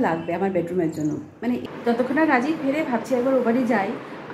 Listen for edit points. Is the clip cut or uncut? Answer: cut